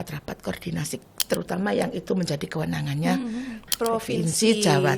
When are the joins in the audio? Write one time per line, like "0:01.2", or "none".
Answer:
0:03.7